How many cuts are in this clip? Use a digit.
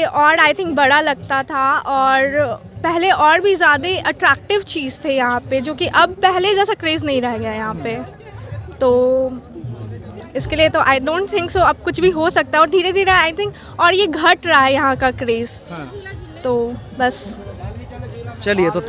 0